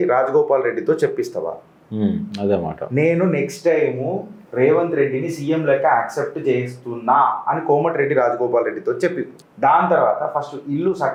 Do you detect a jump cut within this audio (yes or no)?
no